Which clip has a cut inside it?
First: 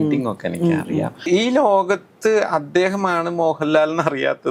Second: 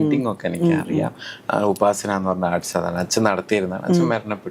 first; 1 cut; at 1.3 s

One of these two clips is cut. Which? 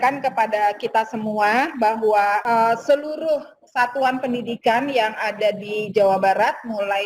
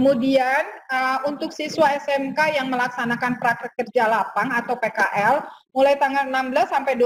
first; 1 cut; at 2.4 s

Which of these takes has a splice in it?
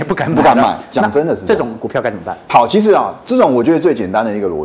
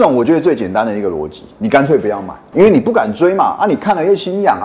second; 1 cut; at 2.4 s

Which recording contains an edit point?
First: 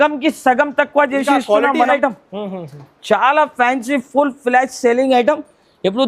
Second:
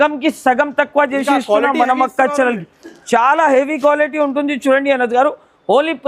first; 1 cut; at 1.9 s

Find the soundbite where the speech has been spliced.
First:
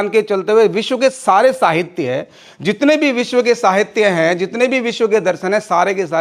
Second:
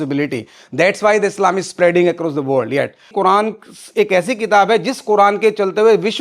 second; 1 cut; at 3.1 s

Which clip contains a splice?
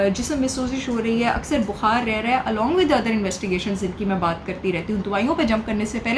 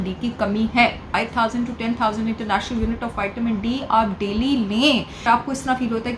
second; 2 cuts; at 1.2 s, 5.2 s

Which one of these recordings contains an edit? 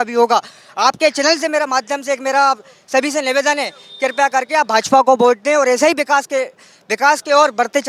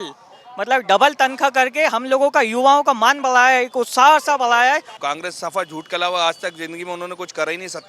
second; 1 cut; at 4.9 s

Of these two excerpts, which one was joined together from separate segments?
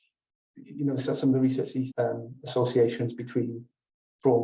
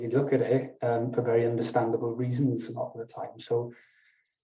first; 1 cut; at 1.9 s

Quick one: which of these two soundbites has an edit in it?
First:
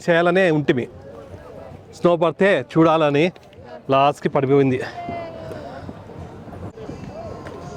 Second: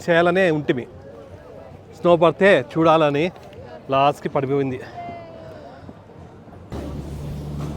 second; 1 cut; at 6.7 s

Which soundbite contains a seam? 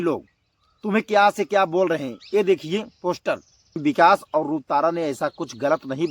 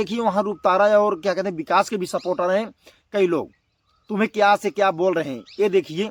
first; 1 cut; at 3.8 s

